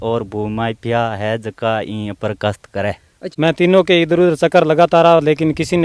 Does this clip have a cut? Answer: yes; 1 cut; at 3.1 s

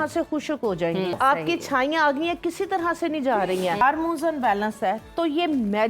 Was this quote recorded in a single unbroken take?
no; 2 cuts; at 1.2 s, 3.8 s

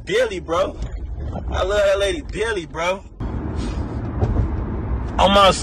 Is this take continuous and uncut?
no; 1 cut; at 3.2 s

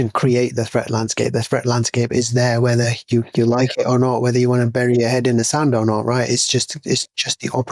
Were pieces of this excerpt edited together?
no; 0 cuts

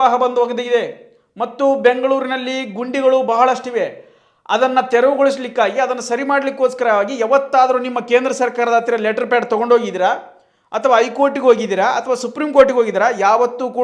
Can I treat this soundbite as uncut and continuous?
yes; 0 cuts

